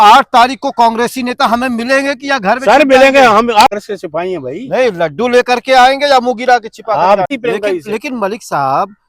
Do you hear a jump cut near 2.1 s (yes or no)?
no